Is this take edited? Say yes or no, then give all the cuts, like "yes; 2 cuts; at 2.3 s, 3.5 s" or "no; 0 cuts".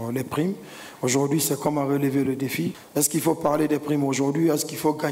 yes; 1 cut; at 2.8 s